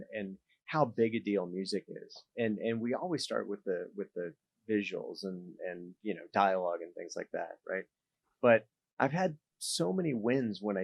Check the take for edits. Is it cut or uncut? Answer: uncut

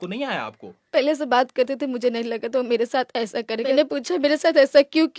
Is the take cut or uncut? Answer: cut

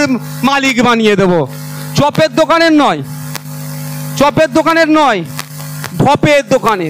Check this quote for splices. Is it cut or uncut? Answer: uncut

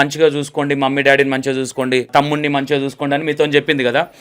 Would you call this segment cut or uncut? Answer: cut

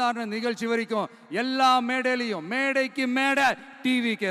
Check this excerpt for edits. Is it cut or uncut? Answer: uncut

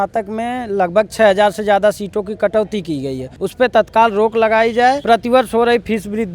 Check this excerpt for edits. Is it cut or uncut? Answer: cut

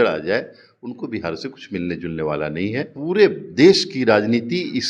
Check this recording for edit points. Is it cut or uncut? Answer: cut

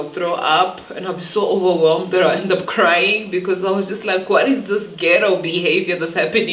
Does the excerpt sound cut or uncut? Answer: uncut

